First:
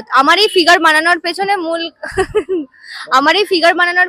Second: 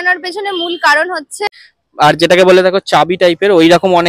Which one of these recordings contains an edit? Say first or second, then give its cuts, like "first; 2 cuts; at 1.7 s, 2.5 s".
second; 1 cut; at 1.5 s